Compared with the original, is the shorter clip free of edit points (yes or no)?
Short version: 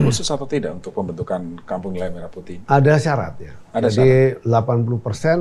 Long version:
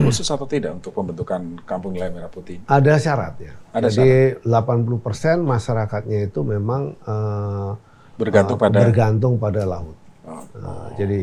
yes